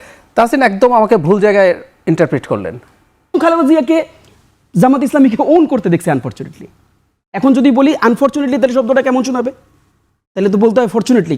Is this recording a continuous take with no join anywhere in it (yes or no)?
no